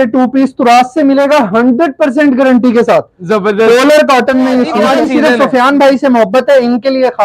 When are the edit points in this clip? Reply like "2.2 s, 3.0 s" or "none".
4.8 s